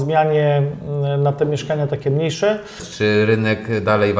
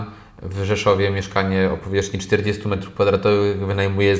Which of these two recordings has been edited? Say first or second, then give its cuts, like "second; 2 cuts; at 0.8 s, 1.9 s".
first; 1 cut; at 2.8 s